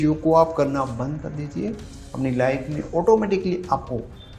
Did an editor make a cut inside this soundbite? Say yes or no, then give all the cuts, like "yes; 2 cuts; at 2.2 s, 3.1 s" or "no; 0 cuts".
no; 0 cuts